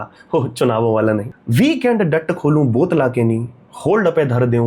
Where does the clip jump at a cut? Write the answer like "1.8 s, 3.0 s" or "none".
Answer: 1.4 s